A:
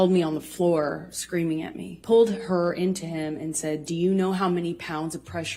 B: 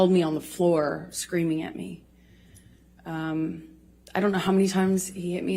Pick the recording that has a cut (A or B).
A